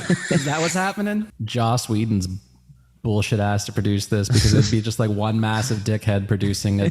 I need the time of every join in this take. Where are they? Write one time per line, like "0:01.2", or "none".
0:01.3